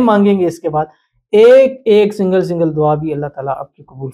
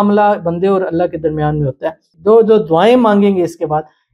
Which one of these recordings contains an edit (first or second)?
second